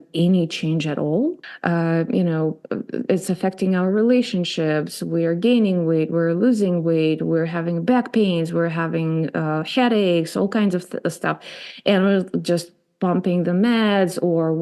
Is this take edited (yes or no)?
yes